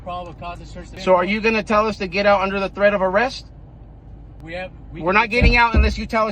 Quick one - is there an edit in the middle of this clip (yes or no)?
yes